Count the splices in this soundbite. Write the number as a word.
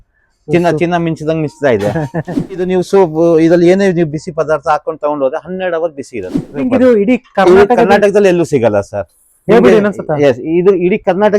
two